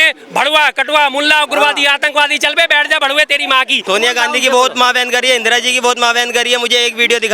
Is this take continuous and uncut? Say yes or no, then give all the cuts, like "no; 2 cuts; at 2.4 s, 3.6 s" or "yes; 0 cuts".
no; 1 cut; at 3.8 s